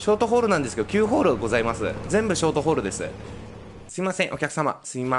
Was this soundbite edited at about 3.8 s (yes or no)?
yes